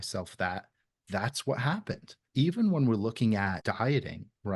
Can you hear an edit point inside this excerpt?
yes; 2 cuts; at 2.2 s, 3.6 s

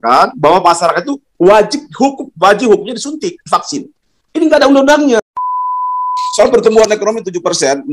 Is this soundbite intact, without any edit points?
no; 1 cut; at 5.8 s

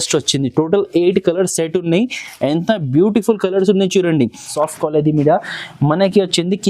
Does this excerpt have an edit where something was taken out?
yes; 1 cut; at 4.5 s

